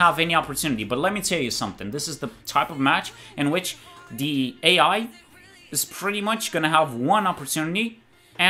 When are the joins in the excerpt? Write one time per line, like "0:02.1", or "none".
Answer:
none